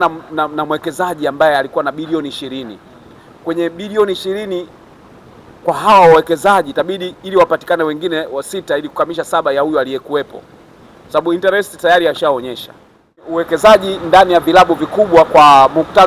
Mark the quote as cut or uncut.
cut